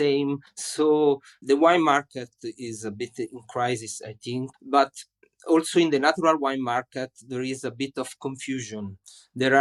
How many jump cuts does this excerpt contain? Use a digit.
0